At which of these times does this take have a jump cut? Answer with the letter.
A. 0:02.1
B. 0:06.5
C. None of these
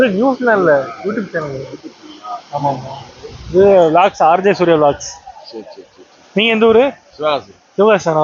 C